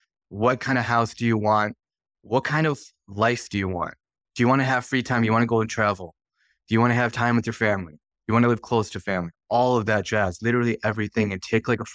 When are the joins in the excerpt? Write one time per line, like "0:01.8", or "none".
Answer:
none